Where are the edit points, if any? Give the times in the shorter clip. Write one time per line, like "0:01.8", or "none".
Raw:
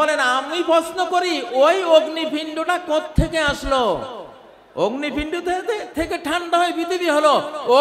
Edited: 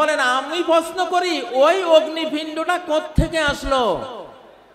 none